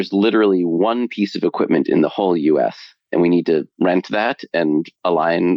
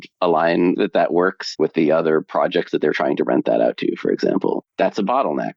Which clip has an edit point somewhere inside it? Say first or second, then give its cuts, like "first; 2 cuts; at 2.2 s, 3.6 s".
second; 1 cut; at 4.7 s